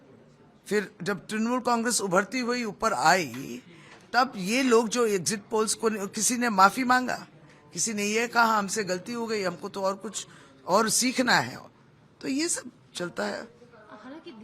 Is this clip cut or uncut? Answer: uncut